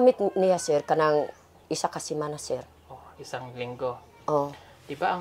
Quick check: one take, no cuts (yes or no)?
yes